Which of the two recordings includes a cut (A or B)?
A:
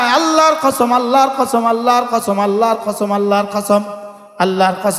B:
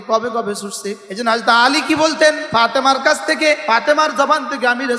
B